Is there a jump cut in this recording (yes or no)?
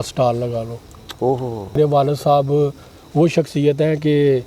yes